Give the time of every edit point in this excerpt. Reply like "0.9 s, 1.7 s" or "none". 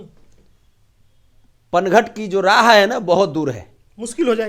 none